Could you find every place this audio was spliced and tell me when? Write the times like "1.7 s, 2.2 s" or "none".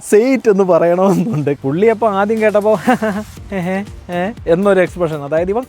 1.6 s

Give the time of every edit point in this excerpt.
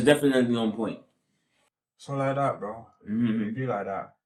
none

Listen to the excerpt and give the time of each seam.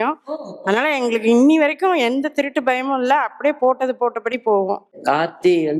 4.9 s

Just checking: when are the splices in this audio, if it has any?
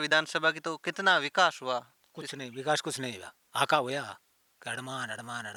none

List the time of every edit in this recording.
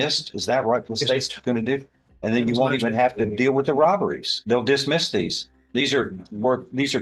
none

